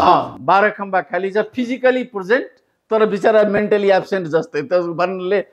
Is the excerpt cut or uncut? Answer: uncut